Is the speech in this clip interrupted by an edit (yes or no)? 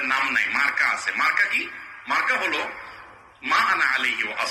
no